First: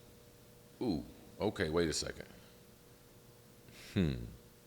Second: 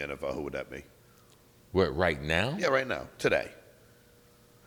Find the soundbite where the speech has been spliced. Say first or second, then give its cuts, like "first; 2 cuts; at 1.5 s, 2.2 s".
first; 1 cut; at 3.7 s